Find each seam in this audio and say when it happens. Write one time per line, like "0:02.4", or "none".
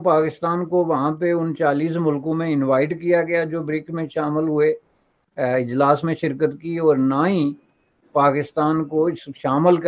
none

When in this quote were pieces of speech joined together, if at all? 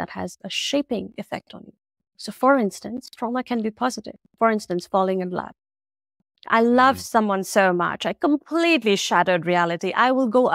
none

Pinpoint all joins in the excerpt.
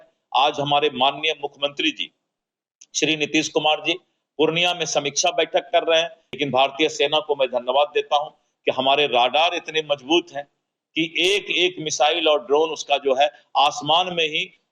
0:06.2

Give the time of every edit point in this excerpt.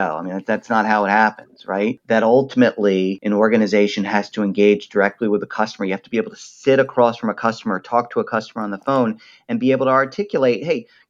0:02.0
0:03.2

